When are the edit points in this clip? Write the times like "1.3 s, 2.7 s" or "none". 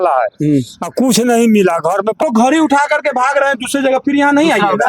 2.2 s